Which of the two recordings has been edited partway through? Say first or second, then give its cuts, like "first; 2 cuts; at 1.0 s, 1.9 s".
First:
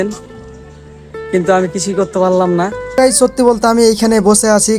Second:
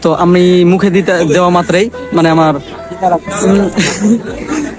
first; 1 cut; at 3.0 s